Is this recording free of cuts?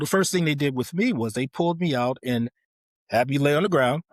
yes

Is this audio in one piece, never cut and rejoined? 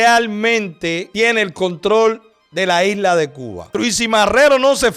no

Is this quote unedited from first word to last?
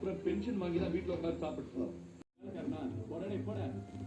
no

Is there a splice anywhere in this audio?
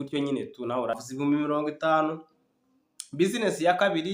yes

